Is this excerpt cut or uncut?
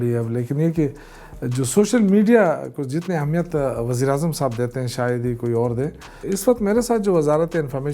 cut